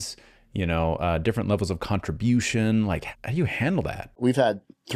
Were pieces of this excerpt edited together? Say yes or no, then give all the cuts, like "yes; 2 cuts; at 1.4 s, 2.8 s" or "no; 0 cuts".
yes; 2 cuts; at 3.1 s, 4.2 s